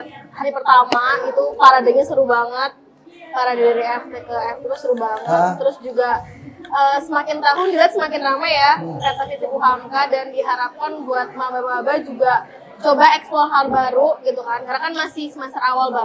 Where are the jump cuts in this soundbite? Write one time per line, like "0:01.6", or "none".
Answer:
none